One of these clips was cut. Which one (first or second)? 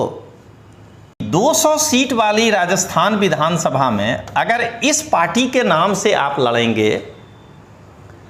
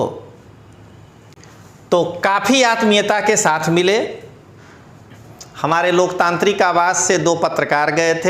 first